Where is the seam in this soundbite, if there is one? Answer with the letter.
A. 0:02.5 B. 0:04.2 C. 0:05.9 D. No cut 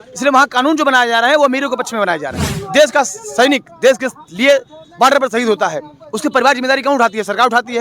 A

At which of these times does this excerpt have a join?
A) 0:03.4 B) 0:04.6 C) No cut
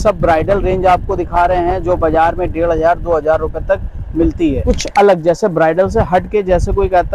B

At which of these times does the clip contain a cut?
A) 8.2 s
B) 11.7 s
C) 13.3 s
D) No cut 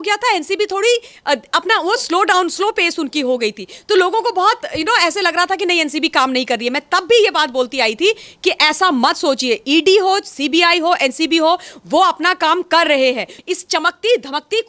C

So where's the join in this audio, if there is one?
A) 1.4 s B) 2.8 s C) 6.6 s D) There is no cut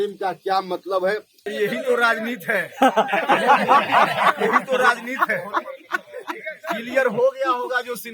A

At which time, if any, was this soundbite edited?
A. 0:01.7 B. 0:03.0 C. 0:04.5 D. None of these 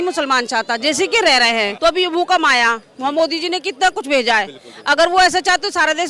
A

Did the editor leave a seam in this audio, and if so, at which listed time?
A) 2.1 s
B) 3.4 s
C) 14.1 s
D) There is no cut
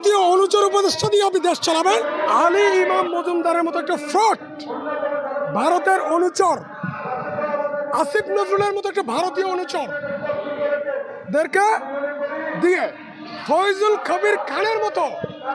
A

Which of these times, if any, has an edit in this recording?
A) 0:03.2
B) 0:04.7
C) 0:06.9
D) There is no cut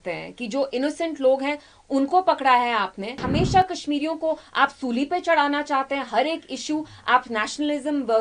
A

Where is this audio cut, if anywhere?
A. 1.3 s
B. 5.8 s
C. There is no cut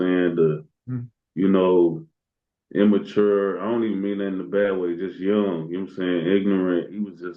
C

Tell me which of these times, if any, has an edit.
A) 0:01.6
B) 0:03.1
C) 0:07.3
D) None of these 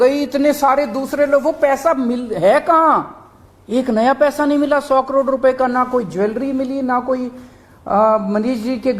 D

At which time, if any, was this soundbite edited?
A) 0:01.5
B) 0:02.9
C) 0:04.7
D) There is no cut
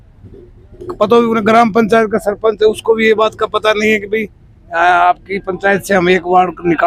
D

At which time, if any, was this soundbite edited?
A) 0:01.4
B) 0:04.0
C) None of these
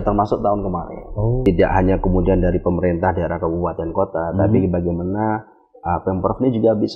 A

